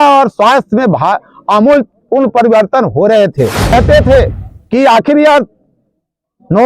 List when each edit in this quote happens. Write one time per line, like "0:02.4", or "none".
0:03.7